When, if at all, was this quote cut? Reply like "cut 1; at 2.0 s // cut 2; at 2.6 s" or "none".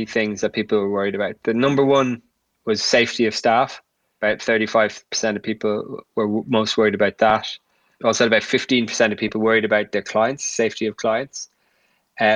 cut 1; at 4.1 s // cut 2; at 7.9 s